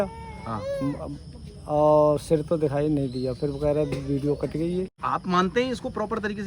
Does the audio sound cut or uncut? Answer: cut